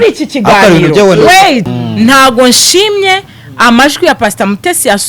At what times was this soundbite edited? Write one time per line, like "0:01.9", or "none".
0:01.7